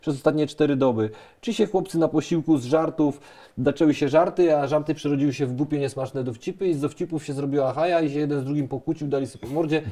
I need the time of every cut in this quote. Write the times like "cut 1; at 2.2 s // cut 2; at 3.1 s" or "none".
none